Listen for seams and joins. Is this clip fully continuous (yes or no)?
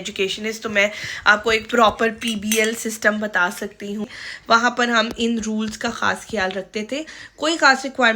no